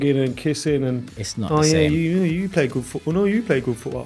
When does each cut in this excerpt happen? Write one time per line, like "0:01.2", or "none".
0:01.2